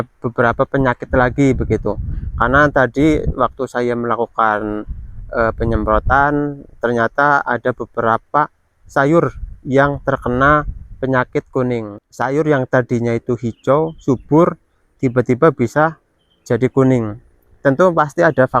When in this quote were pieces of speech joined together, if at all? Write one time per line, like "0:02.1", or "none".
0:11.9